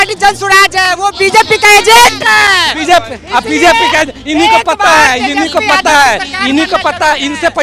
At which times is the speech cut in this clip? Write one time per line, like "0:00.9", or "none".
none